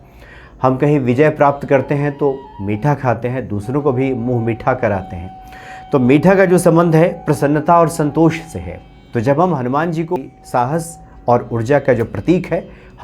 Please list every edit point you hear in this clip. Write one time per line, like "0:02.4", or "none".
0:10.2